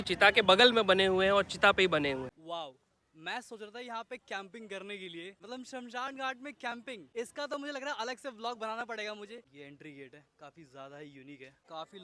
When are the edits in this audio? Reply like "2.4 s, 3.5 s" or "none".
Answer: none